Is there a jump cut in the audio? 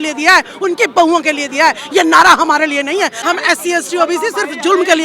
yes; 1 cut; at 3.2 s

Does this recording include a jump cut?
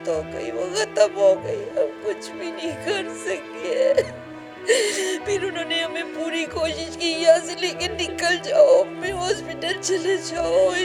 no; 0 cuts

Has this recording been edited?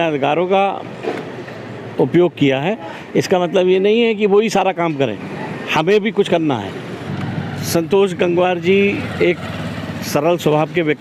no; 0 cuts

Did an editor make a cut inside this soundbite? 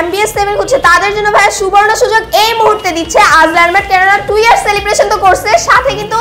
no; 0 cuts

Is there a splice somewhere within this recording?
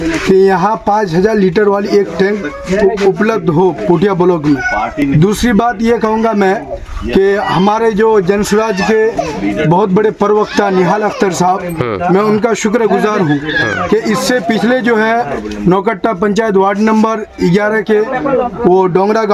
no; 0 cuts

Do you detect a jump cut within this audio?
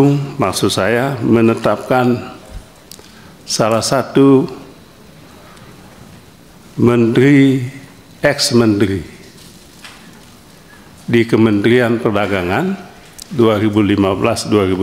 no; 0 cuts

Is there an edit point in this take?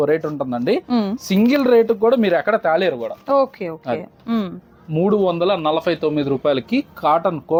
no; 0 cuts

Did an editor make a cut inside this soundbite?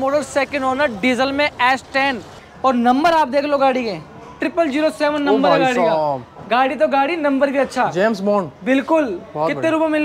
yes; 1 cut; at 2.3 s

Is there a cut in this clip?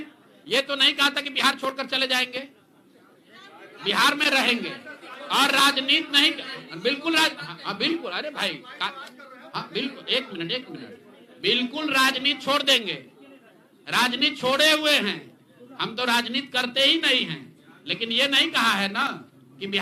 no; 0 cuts

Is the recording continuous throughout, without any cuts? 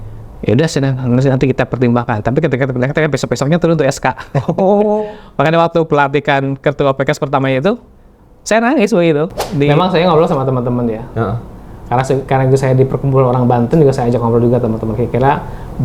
no; 1 cut; at 9.4 s

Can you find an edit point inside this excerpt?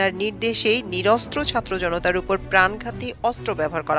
no; 0 cuts

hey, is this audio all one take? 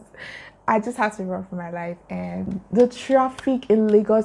no; 1 cut; at 2.5 s

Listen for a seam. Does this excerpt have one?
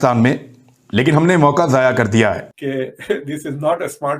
yes; 1 cut; at 2.5 s

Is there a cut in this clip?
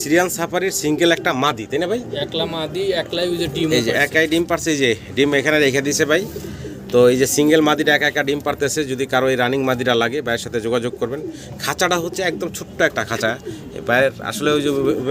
no; 0 cuts

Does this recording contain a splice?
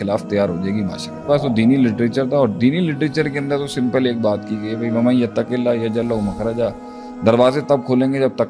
yes; 1 cut; at 1.2 s

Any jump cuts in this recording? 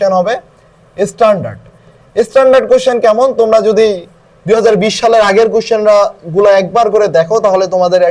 no; 0 cuts

